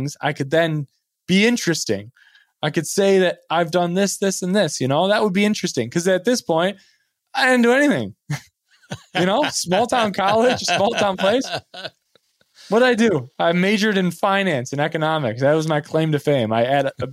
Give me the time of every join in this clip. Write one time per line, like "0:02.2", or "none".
none